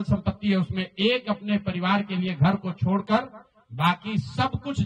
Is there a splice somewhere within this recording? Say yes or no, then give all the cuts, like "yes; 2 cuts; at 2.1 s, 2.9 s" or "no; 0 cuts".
no; 0 cuts